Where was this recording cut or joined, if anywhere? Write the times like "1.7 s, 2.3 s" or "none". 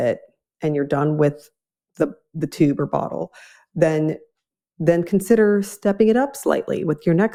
none